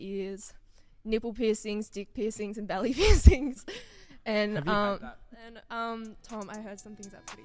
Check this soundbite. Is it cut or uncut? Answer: cut